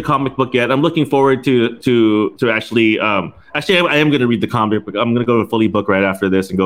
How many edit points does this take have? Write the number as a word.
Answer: zero